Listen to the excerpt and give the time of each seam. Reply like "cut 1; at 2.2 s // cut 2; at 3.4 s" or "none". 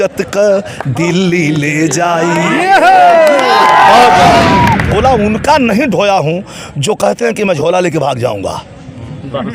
cut 1; at 4.9 s